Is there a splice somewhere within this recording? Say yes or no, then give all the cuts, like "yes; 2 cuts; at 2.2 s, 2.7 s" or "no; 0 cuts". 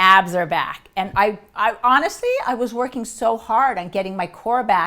no; 0 cuts